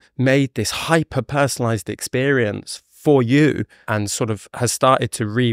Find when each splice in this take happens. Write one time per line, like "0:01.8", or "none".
0:03.8

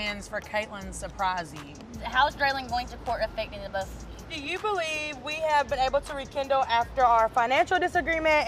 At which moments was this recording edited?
0:01.9
0:04.4

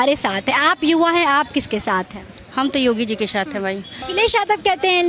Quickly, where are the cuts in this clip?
0:04.0

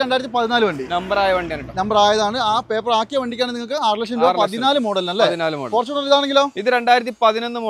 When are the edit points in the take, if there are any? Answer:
none

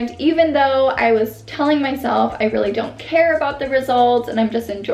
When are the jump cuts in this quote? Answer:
none

